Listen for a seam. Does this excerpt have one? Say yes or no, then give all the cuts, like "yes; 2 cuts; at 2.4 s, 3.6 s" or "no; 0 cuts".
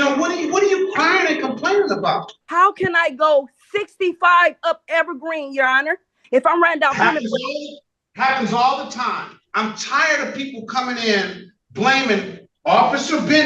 yes; 3 cuts; at 2.4 s, 6.2 s, 9.4 s